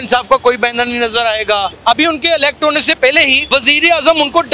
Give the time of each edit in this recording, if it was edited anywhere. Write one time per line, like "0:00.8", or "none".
0:01.7
0:03.4